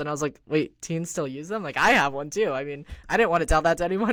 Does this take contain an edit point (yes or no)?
no